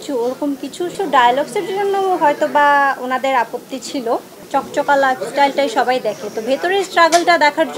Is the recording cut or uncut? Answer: cut